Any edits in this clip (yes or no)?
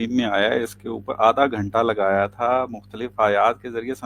no